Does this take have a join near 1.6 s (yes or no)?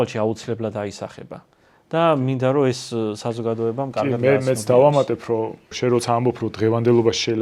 no